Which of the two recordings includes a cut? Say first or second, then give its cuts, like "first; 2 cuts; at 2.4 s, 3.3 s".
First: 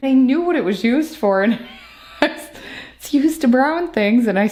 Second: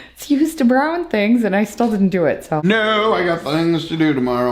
second; 1 cut; at 2.6 s